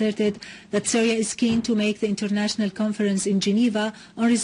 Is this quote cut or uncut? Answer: cut